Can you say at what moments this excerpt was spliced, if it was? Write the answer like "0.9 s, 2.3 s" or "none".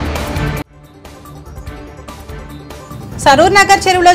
none